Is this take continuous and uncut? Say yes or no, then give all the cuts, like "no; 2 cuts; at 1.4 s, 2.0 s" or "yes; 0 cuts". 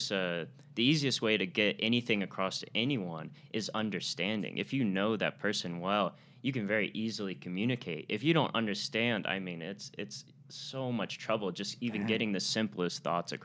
yes; 0 cuts